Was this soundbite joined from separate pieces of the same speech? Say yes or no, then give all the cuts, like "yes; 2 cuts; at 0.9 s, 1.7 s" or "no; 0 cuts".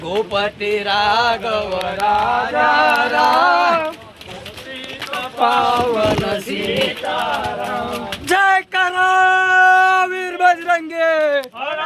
no; 0 cuts